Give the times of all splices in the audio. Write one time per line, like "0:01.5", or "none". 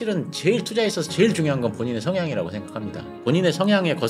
none